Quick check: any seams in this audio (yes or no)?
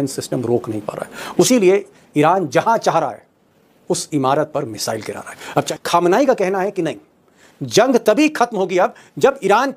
yes